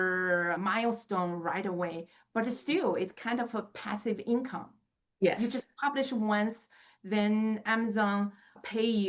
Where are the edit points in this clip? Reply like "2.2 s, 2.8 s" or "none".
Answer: none